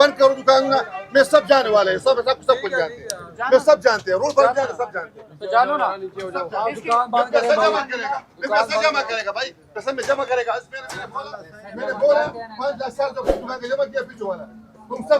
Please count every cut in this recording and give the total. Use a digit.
0